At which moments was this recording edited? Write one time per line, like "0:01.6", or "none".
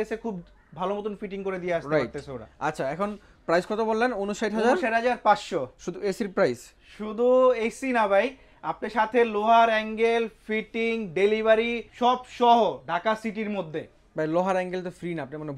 none